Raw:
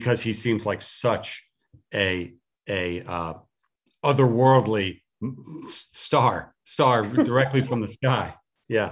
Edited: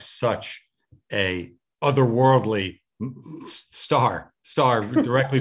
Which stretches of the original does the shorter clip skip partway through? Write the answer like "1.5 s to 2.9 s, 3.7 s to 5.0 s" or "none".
2.4 s to 3.8 s